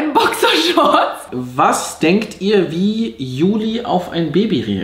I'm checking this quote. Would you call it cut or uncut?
cut